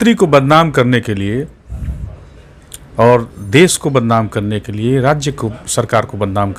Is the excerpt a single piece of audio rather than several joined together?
yes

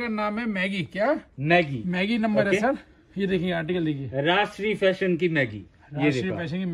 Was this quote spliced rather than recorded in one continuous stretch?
no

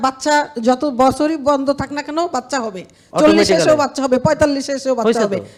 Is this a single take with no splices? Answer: yes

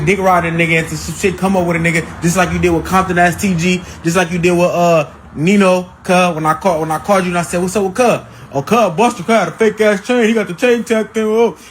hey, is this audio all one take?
no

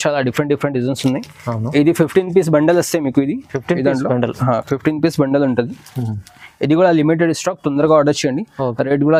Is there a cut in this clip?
no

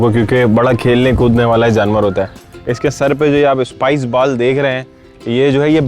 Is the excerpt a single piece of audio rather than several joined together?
no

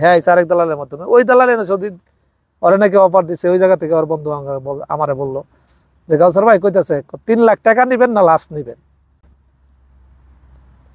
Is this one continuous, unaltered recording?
yes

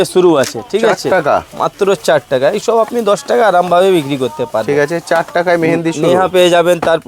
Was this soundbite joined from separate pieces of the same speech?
no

